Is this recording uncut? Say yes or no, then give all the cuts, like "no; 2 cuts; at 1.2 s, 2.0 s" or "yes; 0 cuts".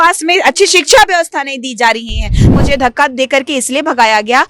no; 1 cut; at 2.5 s